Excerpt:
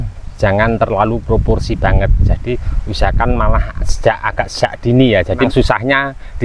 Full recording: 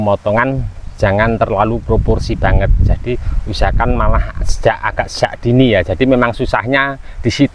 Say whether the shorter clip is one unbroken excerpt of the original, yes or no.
no